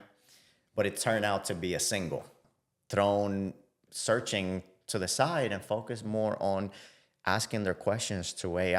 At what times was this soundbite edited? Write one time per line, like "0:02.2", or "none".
0:02.4